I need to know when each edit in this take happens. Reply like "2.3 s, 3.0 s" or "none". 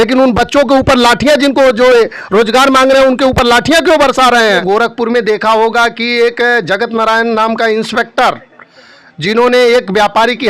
4.6 s